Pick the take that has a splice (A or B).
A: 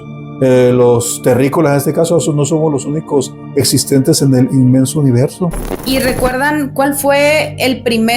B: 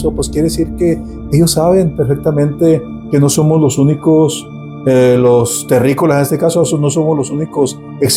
A